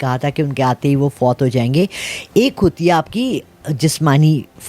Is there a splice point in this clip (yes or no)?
no